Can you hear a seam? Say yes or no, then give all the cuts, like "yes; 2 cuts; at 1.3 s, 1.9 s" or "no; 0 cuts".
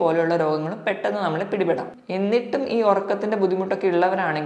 yes; 1 cut; at 1.9 s